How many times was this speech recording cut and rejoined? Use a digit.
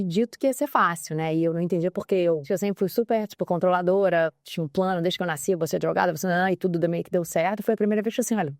1